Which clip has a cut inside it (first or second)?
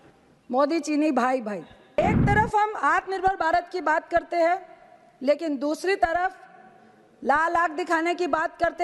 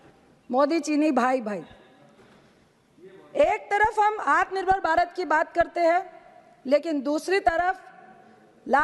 first